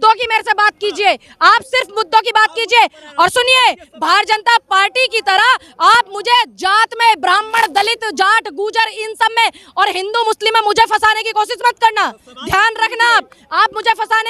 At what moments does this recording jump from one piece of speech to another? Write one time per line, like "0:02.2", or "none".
none